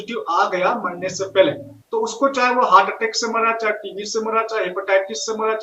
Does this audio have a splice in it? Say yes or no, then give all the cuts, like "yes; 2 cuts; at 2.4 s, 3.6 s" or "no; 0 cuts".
yes; 1 cut; at 1.7 s